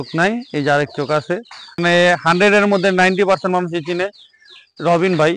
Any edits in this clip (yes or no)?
yes